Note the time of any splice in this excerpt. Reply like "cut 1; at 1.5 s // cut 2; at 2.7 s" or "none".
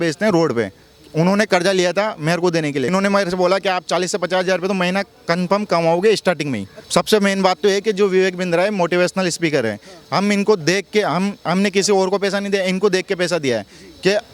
cut 1; at 2.9 s // cut 2; at 6.7 s